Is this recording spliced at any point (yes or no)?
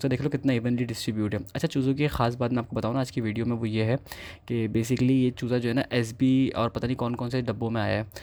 no